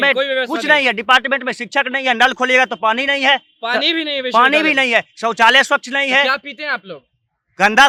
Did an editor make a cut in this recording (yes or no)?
no